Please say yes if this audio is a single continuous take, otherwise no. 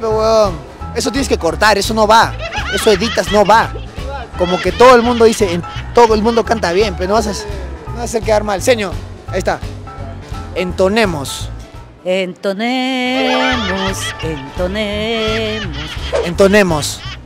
yes